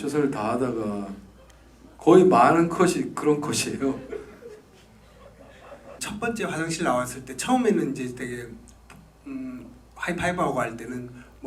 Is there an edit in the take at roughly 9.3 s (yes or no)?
no